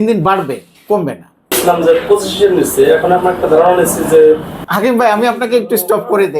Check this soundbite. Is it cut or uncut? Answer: cut